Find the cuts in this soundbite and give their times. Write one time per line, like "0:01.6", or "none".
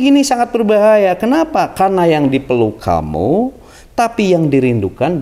none